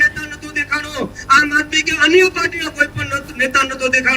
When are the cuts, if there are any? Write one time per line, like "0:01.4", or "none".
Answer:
none